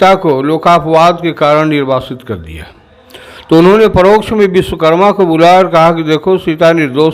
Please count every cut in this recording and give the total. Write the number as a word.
zero